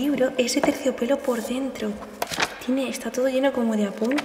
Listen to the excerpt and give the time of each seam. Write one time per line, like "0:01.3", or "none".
0:02.1